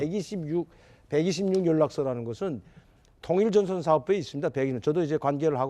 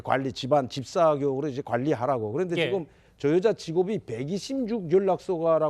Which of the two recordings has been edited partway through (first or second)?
first